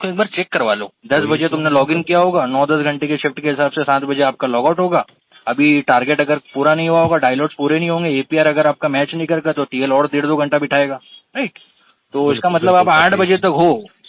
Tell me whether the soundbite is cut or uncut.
cut